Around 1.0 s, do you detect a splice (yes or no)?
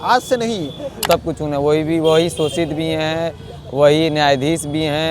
yes